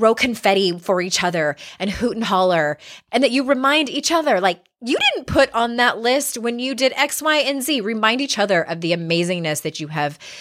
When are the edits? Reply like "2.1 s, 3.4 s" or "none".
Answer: 2.9 s